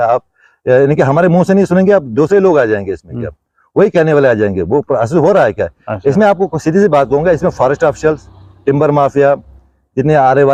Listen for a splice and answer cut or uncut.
uncut